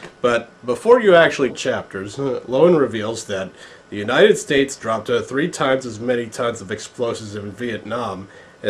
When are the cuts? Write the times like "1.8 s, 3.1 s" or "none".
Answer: none